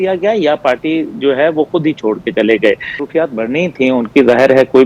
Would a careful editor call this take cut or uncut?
cut